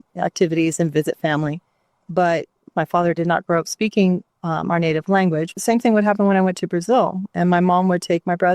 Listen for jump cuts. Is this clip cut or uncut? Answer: cut